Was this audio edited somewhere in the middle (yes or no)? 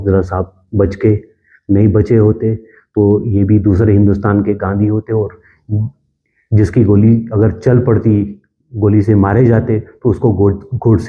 no